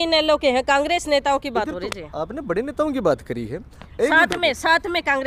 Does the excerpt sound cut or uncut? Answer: uncut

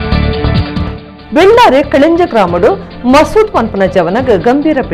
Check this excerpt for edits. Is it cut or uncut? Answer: cut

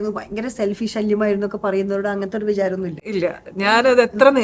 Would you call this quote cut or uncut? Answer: uncut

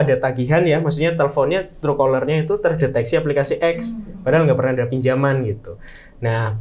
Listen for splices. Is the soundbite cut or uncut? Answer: uncut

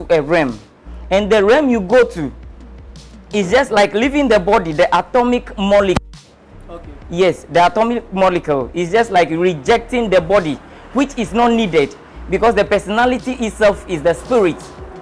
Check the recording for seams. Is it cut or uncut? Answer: uncut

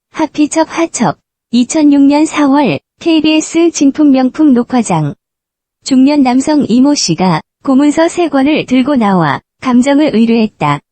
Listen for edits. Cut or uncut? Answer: cut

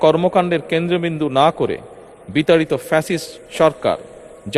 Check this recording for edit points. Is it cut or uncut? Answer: uncut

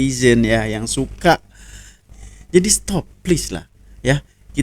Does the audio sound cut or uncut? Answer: cut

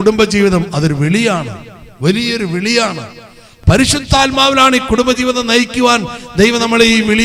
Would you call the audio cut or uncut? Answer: uncut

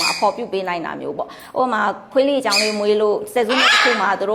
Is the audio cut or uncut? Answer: uncut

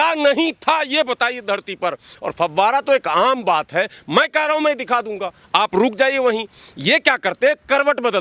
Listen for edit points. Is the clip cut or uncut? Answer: uncut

